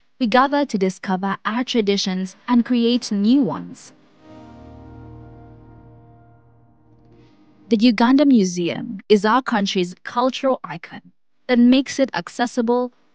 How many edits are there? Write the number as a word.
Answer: zero